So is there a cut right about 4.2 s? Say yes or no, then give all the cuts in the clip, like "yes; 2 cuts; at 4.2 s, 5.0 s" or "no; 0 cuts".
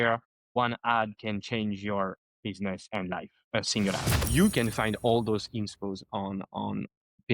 yes; 1 cut; at 4.2 s